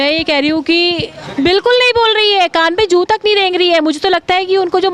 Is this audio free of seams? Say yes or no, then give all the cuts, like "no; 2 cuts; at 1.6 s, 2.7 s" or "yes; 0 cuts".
no; 1 cut; at 1.2 s